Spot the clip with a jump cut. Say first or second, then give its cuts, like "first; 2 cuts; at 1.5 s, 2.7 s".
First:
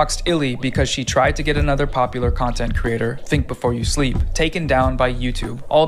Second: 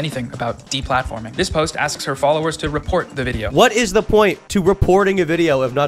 second; 1 cut; at 3.4 s